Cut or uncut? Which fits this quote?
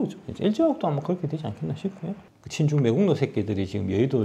cut